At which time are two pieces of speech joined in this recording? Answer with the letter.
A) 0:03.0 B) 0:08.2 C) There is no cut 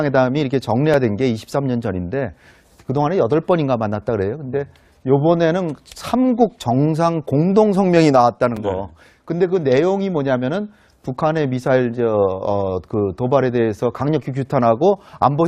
B